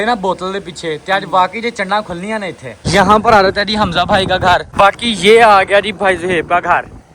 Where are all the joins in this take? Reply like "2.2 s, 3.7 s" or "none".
2.9 s, 4.7 s